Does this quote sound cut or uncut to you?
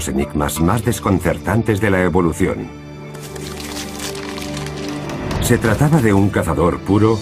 cut